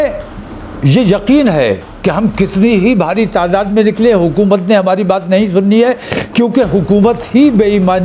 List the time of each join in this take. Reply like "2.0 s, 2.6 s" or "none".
none